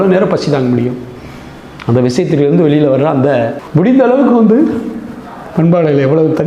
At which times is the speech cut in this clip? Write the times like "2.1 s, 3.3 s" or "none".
3.6 s